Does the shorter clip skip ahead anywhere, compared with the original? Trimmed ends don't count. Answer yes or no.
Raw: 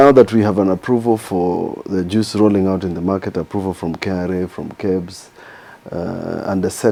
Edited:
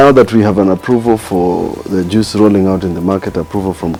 no